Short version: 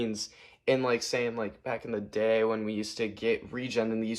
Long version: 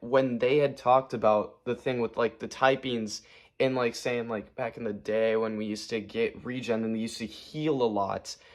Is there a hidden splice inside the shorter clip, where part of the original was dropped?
no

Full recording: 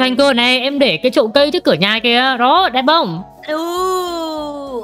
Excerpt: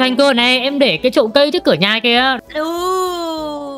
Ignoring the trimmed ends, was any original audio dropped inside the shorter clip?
yes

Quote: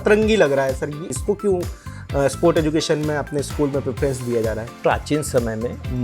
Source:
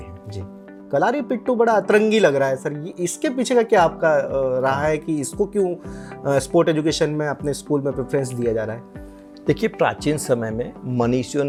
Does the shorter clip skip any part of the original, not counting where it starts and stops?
yes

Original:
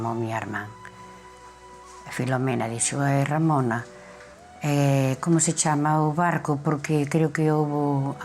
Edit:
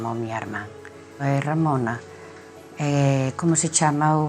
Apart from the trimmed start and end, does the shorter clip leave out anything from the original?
yes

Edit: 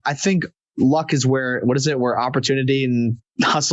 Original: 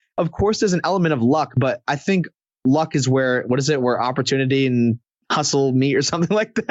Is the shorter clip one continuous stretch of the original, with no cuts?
yes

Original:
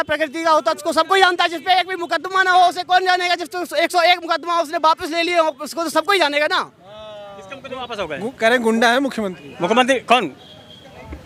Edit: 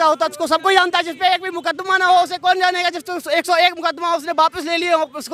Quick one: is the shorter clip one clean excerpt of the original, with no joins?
yes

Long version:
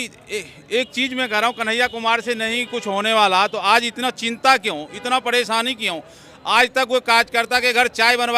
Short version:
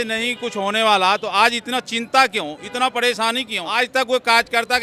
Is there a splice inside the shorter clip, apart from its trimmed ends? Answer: yes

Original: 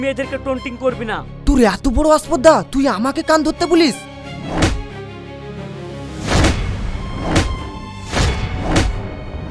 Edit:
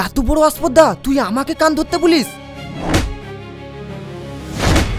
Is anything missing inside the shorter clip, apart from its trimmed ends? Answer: no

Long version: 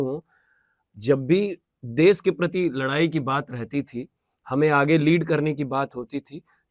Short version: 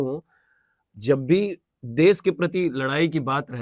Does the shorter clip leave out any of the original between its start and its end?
no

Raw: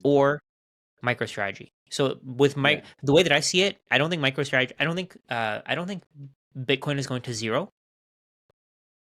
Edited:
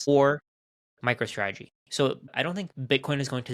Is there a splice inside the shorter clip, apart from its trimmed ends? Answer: yes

